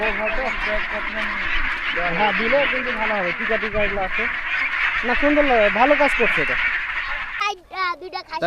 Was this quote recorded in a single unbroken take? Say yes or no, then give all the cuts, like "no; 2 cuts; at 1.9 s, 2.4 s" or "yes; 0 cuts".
no; 1 cut; at 7.4 s